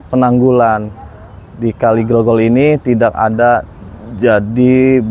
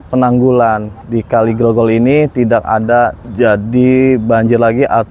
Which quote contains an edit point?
second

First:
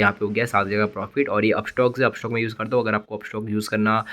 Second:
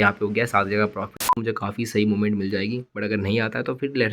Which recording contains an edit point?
second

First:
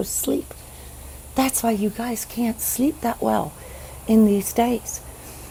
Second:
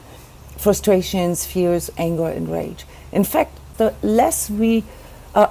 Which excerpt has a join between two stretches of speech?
second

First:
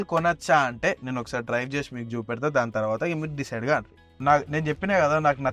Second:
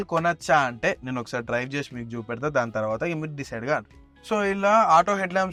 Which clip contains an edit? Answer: first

